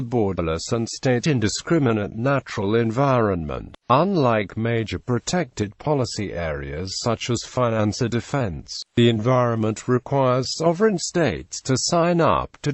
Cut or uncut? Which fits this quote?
uncut